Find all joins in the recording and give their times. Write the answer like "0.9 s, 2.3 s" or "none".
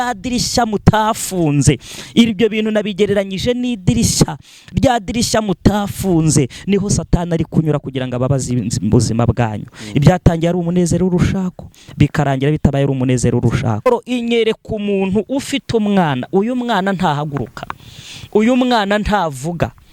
13.9 s